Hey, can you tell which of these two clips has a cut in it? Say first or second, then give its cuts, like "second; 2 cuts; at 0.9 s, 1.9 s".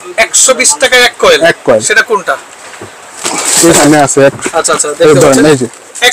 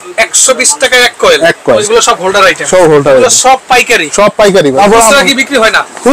second; 2 cuts; at 1.8 s, 4.8 s